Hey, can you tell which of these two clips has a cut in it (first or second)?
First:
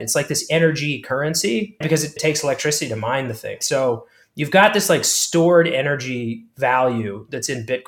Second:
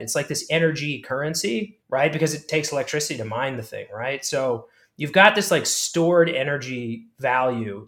first